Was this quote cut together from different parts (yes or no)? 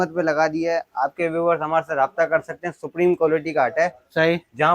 no